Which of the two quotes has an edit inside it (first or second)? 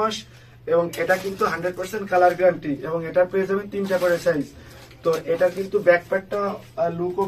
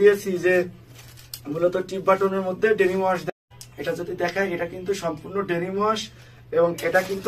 second